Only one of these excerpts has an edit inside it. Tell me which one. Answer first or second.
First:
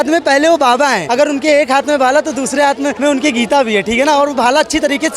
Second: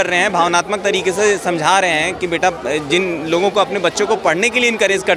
first